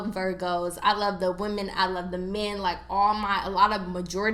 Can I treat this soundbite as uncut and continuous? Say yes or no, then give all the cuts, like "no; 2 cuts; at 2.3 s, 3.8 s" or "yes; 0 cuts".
yes; 0 cuts